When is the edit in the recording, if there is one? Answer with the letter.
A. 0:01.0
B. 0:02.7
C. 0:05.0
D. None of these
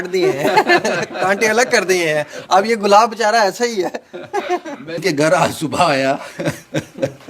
C